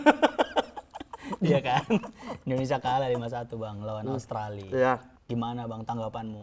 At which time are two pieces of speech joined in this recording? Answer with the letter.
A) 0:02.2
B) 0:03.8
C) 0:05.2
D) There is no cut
C